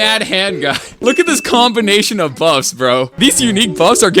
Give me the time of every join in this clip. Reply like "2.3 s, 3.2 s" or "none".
1.0 s, 3.1 s